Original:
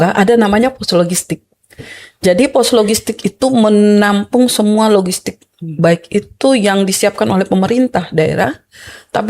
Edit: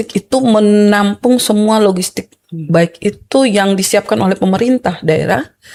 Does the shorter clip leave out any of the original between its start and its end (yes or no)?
no